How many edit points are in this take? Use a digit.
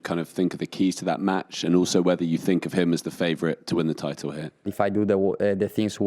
1